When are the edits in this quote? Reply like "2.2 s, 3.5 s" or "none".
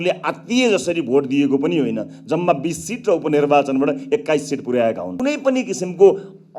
5.1 s